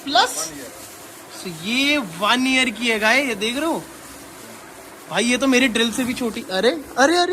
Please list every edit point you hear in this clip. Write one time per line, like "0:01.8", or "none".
none